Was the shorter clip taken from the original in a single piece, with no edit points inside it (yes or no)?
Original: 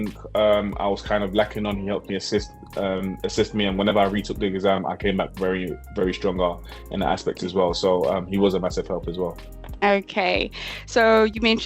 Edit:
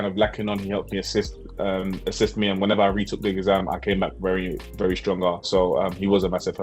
no